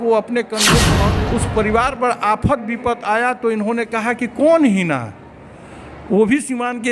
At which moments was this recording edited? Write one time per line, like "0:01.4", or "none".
0:01.0